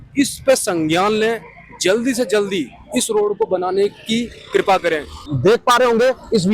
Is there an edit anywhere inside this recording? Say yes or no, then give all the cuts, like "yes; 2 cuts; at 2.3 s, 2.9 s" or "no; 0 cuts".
yes; 1 cut; at 5.2 s